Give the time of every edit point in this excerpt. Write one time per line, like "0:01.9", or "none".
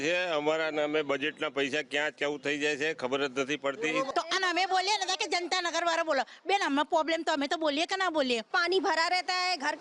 0:04.1
0:08.5